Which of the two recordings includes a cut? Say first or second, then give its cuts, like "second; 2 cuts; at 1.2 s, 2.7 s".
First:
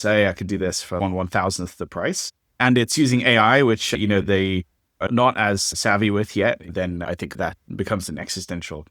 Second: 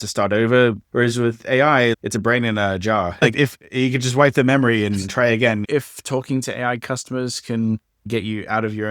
second; 3 cuts; at 0.8 s, 3.2 s, 5.6 s